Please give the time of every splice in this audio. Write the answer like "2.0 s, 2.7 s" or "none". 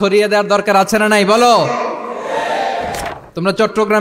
3.0 s